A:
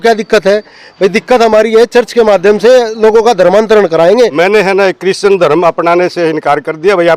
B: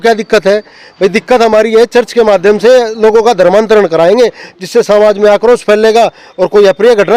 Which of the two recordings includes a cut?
A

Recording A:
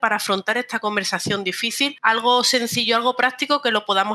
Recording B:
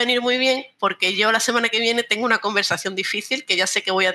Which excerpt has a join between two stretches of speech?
A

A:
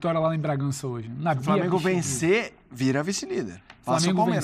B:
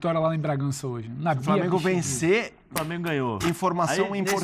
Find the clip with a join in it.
B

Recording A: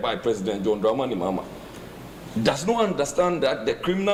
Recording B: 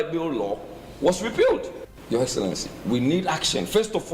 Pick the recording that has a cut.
B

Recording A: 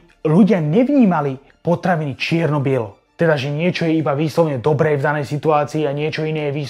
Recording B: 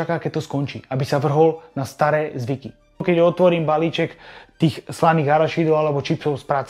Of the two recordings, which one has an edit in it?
B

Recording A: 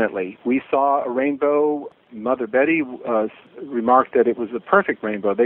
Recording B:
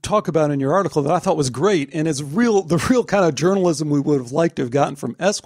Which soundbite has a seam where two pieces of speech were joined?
A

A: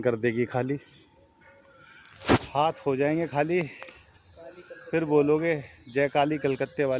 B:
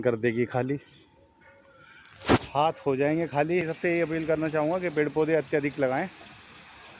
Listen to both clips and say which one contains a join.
B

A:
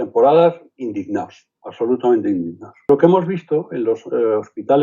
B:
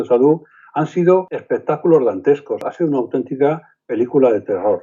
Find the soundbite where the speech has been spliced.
A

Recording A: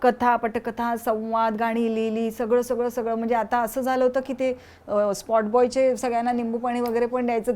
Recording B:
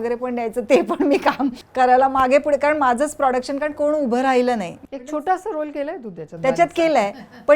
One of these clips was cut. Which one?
B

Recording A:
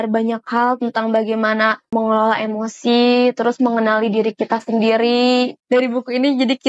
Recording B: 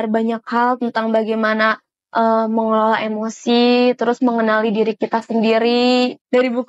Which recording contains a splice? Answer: A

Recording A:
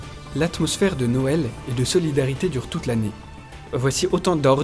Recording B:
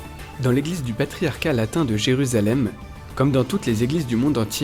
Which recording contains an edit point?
A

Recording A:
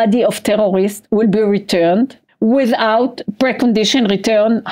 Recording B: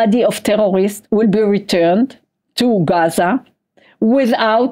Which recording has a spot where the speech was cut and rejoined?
A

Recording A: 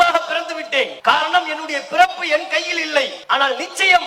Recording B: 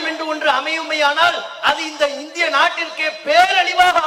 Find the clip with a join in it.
A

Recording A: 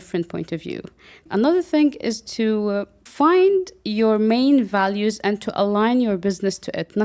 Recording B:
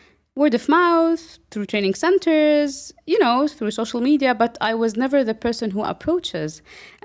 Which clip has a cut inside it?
A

